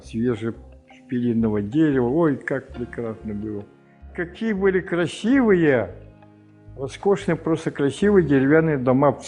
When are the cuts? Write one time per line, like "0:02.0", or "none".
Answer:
0:04.1